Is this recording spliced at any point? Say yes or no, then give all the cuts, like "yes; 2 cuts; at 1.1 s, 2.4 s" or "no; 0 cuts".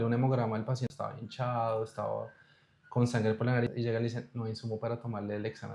yes; 2 cuts; at 0.9 s, 3.7 s